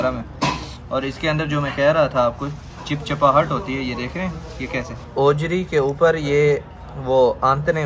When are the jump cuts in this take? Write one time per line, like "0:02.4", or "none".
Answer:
0:05.1